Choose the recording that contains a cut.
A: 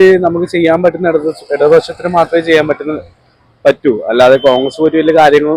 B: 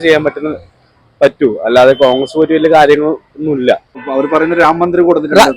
B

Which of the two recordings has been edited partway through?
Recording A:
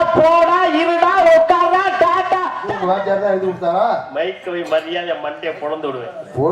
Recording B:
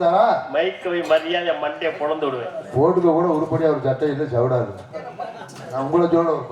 A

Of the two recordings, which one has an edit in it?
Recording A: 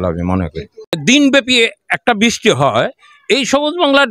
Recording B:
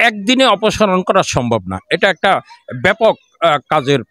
A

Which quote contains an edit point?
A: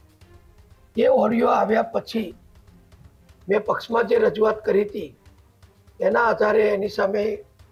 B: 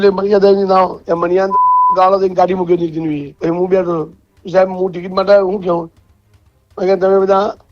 B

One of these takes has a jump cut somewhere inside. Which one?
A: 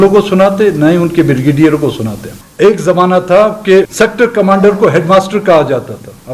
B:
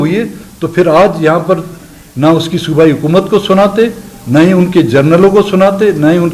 A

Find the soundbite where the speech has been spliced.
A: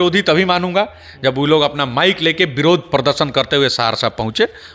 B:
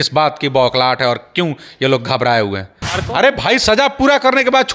B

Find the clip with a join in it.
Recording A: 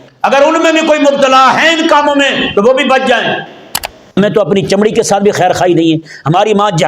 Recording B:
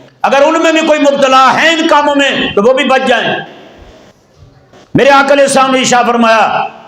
A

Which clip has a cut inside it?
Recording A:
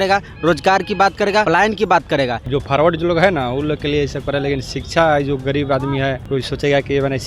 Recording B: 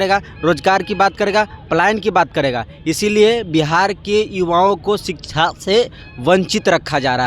A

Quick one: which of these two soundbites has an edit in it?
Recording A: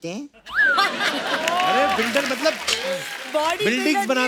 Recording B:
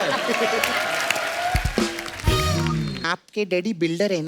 B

